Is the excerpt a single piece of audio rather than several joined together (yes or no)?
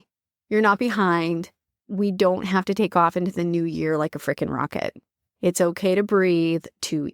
yes